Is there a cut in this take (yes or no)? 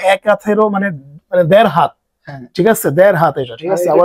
no